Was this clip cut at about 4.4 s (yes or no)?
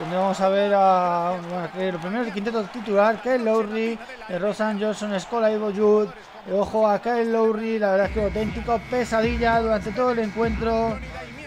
yes